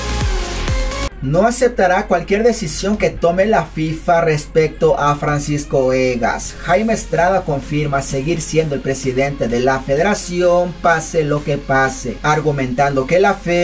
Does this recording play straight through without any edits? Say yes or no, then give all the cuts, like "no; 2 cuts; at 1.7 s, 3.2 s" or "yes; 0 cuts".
yes; 0 cuts